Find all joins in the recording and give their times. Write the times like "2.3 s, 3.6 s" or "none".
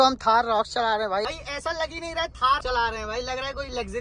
1.3 s, 2.6 s